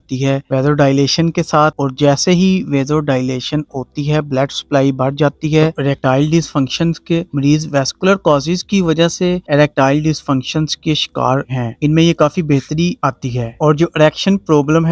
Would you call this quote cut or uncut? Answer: uncut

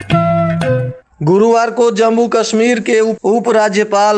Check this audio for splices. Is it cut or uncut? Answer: cut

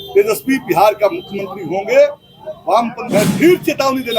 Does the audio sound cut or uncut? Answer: cut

